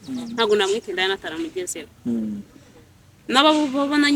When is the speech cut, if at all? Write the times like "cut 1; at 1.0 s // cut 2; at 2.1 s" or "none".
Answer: none